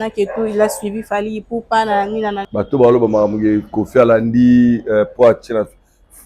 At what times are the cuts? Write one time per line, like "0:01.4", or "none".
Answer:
0:02.4